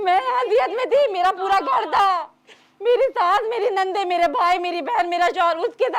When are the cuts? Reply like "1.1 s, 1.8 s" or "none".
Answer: none